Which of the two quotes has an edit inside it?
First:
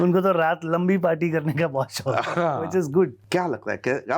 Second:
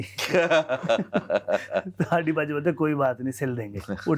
first; 1 cut; at 3.2 s

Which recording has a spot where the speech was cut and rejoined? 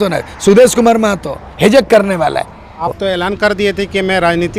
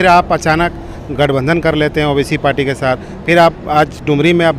first; 1 cut; at 2.8 s

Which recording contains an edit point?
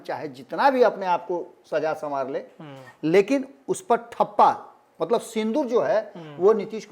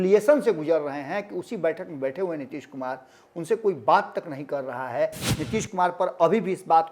second; 1 cut; at 5.2 s

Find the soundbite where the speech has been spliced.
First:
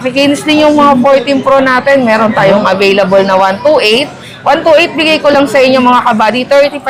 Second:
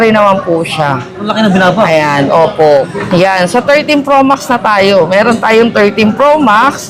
second; 1 cut; at 2.9 s

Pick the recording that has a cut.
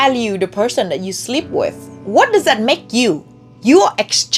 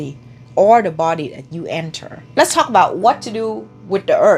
second; 1 cut; at 2.2 s

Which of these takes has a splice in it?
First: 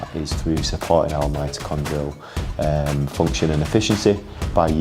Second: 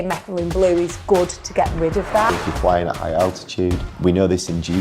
second; 2 cuts; at 2.3 s, 3.9 s

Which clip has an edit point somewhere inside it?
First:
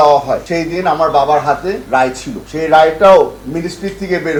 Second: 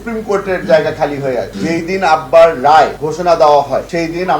second; 1 cut; at 1.5 s

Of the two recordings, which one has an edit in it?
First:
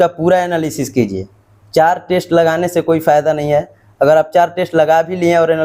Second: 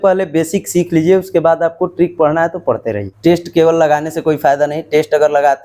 second; 1 cut; at 3.1 s

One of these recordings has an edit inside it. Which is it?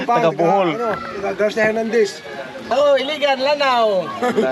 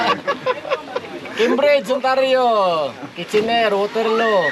first; 1 cut; at 2.6 s

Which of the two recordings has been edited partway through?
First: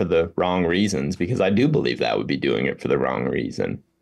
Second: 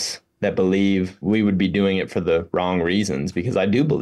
second; 1 cut; at 1.2 s

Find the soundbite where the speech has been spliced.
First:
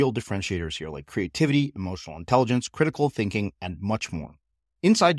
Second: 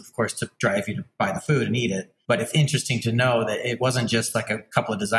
second; 3 cuts; at 1.0 s, 2.1 s, 3.8 s

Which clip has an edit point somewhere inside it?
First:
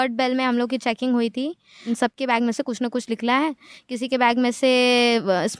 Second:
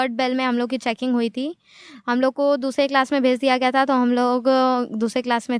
first; 1 cut; at 1.8 s

